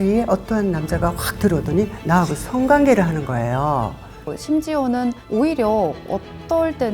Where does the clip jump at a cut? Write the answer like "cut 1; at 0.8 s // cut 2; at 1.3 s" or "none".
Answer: cut 1; at 4.3 s